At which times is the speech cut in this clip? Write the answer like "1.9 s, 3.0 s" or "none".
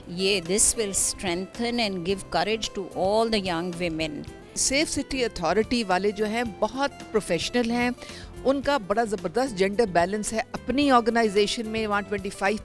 4.6 s